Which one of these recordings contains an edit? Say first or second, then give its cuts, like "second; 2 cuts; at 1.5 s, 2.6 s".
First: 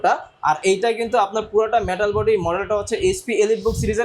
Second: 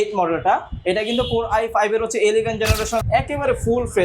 second; 1 cut; at 3.0 s